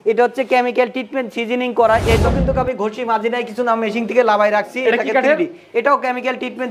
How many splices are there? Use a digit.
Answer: 1